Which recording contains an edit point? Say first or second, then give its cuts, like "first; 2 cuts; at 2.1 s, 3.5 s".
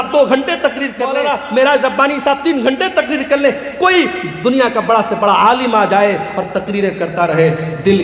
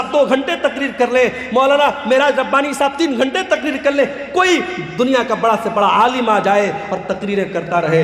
first; 1 cut; at 1.0 s